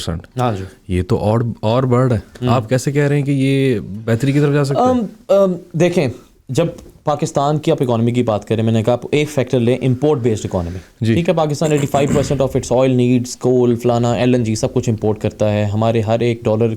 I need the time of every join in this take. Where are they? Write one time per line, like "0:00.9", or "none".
none